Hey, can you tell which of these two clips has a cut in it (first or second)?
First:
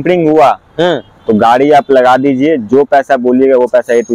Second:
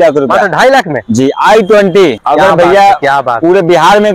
second